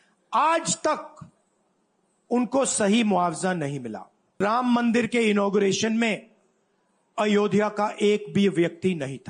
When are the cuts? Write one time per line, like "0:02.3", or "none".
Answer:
0:04.4